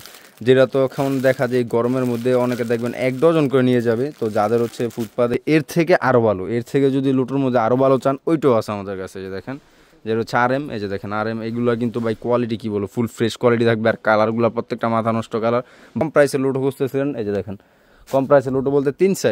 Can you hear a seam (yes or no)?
yes